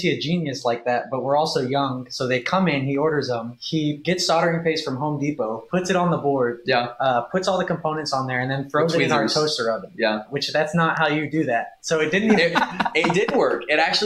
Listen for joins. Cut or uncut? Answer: cut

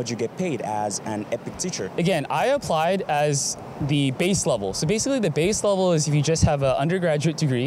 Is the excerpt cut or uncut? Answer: uncut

